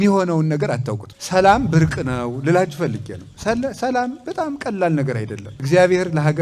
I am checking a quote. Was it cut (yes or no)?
yes